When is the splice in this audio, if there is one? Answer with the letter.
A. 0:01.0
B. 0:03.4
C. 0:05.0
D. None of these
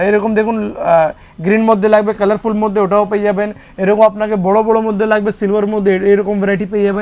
D